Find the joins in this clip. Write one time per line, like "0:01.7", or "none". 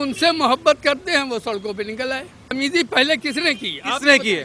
0:02.5

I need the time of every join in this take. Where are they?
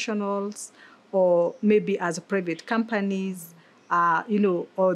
none

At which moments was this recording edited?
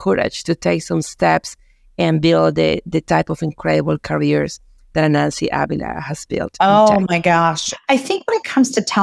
0:07.8

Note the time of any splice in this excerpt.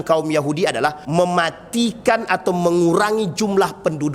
0:01.0

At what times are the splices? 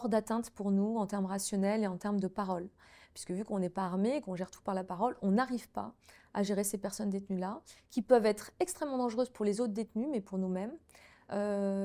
none

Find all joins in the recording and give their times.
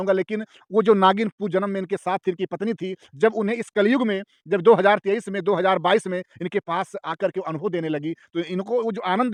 none

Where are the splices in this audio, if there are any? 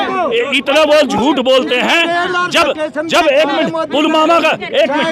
none

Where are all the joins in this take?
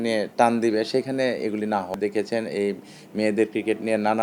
0:01.9

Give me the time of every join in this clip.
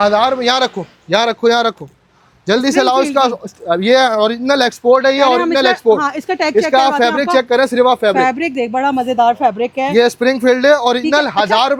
none

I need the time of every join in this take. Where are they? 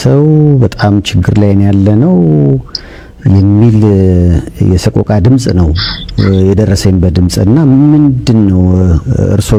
none

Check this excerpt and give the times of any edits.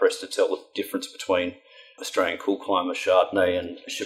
none

